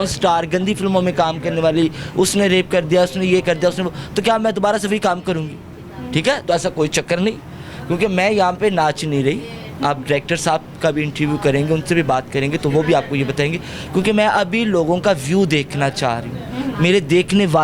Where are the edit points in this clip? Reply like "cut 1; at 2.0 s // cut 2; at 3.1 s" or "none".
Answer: none